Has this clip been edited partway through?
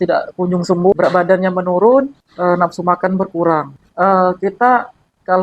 yes; 3 cuts; at 0.9 s, 2.2 s, 3.8 s

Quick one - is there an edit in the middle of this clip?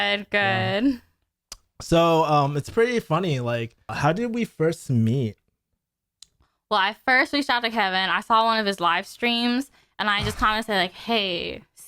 yes; 1 cut; at 3.9 s

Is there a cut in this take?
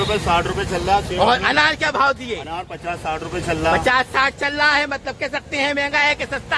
no; 0 cuts

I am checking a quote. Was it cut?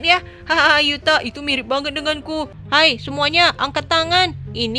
yes; 1 cut; at 2.6 s

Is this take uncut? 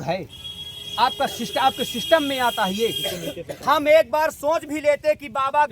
no; 1 cut; at 3.6 s

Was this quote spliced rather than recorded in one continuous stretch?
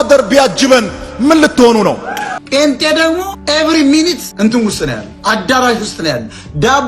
yes; 3 cuts; at 2.3 s, 3.4 s, 4.3 s

